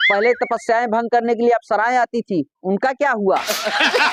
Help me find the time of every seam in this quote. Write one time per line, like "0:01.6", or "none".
none